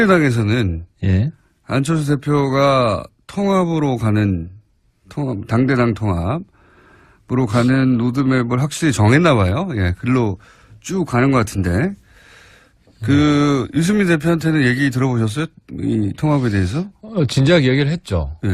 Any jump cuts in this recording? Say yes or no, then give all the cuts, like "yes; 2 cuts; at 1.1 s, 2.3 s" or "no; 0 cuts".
yes; 1 cut; at 3.2 s